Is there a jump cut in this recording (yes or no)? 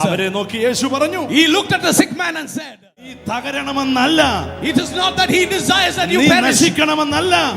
yes